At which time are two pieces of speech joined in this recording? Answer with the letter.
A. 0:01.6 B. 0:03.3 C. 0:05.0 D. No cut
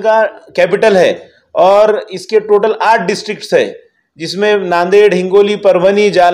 D